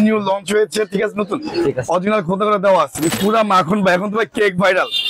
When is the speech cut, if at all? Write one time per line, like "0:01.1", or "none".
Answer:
0:03.2